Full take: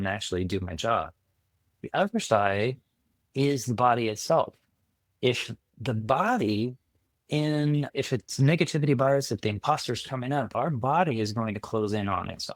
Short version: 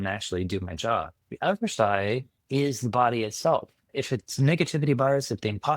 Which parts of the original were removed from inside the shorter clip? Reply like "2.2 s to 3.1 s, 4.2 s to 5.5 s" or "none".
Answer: 1.2 s to 1.7 s, 2.9 s to 3.2 s, 4.7 s to 7.9 s